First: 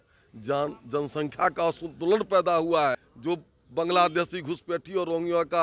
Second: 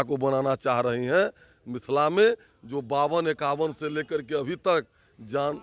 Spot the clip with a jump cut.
first; 1 cut; at 3.1 s

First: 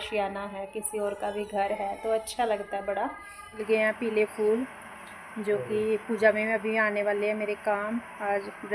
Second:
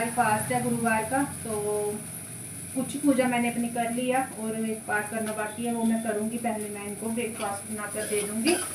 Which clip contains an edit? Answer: first; 1 cut; at 3.6 s

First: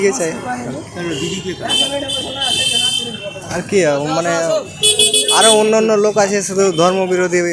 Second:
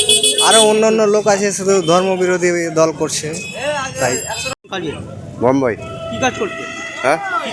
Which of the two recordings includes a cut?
second; 1 cut; at 4.5 s

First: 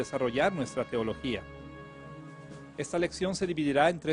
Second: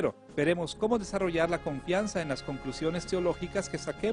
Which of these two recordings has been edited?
first; 1 cut; at 2.7 s

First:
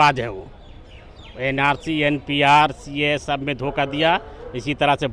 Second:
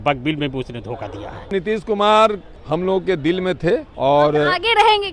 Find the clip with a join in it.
second; 3 cuts; at 1.5 s, 2.5 s, 3.9 s

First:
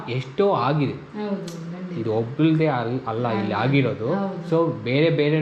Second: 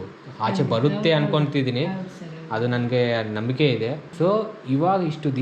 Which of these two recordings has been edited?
second; 1 cut; at 4.0 s

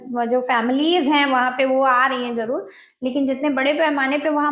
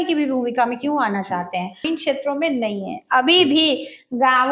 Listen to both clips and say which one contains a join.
second; 1 cut; at 1.8 s

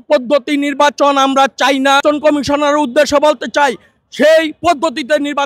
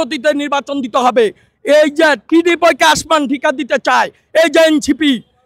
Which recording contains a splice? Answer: first; 1 cut; at 2.0 s

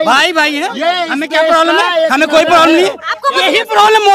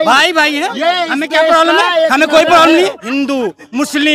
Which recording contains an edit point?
second; 1 cut; at 3.0 s

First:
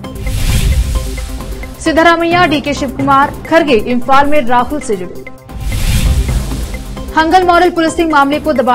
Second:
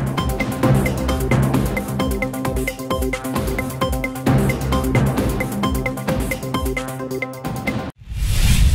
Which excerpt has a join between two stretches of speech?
second; 1 cut; at 7.8 s

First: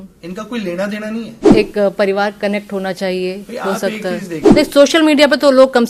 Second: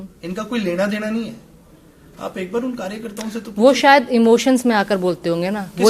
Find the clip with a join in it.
first; 2 cuts; at 1.5 s, 4.5 s

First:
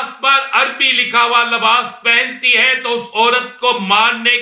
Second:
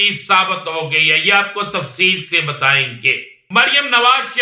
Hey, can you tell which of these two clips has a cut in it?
second; 1 cut; at 3.4 s

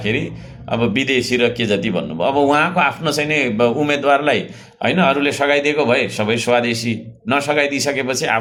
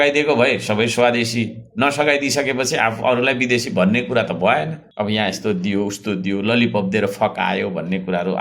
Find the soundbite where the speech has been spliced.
second; 1 cut; at 4.8 s

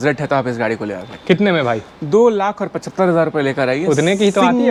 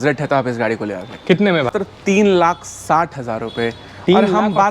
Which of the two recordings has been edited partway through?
second; 1 cut; at 1.7 s

